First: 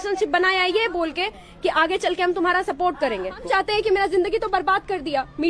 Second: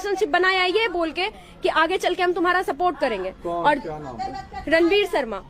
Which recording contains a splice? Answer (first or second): first